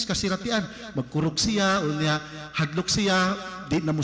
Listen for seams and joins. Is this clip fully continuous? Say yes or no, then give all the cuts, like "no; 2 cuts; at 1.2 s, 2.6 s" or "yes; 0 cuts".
yes; 0 cuts